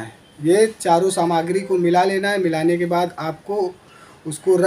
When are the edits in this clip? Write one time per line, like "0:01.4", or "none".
none